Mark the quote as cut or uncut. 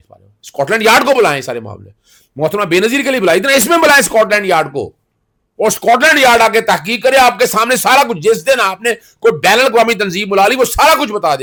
uncut